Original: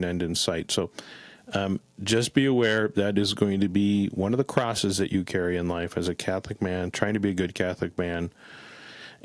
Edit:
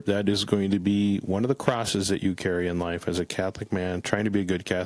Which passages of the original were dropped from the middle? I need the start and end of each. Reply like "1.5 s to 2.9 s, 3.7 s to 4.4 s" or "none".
none